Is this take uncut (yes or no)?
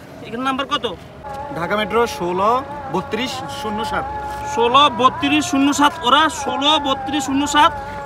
no